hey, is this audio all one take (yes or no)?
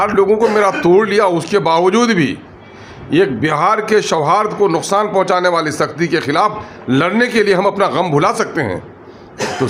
yes